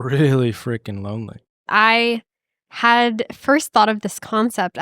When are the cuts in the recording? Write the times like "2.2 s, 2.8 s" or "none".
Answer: 1.7 s